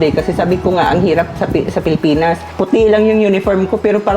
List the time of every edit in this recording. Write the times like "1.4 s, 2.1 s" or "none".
2.5 s